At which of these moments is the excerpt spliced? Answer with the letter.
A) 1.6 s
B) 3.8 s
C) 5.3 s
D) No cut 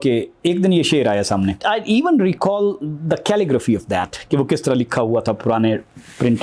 A